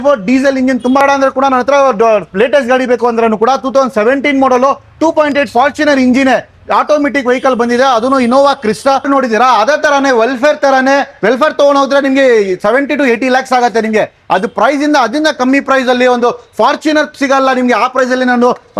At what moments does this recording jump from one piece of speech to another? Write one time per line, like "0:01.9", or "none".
0:01.0
0:09.1